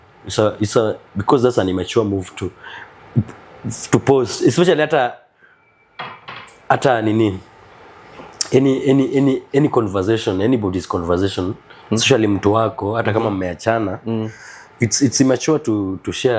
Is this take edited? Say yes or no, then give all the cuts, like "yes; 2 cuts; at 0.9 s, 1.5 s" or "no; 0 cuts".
no; 0 cuts